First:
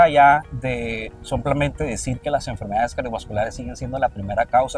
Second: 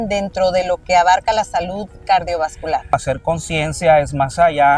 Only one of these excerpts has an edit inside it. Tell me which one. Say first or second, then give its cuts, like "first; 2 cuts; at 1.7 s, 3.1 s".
second; 1 cut; at 2.9 s